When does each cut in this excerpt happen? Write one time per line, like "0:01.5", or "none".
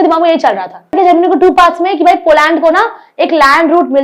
0:01.0